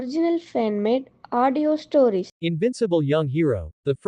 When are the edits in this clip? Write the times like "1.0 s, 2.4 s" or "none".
2.3 s